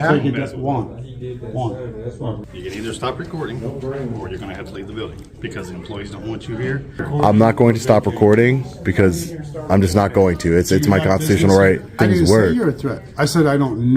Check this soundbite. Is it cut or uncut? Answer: cut